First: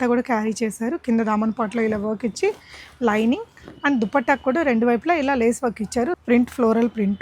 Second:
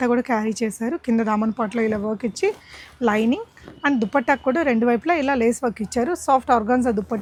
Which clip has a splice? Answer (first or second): first